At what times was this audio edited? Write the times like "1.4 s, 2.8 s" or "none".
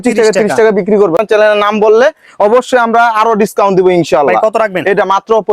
1.2 s